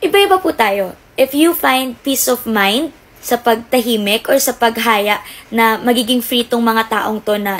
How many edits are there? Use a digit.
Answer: 0